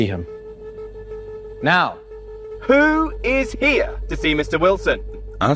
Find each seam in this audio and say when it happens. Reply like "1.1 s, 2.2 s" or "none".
none